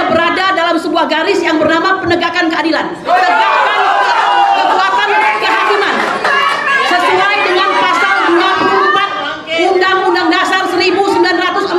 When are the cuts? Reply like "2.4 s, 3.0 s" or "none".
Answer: none